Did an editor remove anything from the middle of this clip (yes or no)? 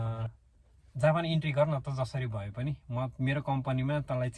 no